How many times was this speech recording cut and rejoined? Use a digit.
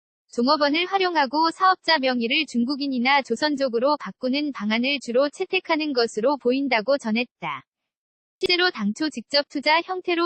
1